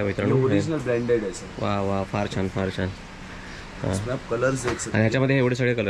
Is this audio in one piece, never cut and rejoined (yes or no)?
yes